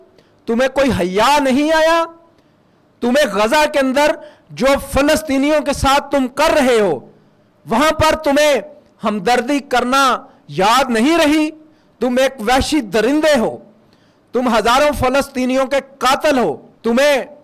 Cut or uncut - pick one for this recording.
uncut